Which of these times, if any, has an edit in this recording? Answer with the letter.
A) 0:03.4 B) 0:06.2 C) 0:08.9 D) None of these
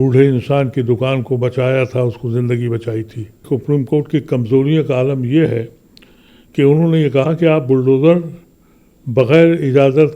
A